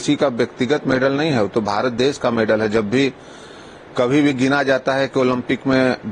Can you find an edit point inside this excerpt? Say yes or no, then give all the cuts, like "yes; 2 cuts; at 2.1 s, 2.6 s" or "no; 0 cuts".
no; 0 cuts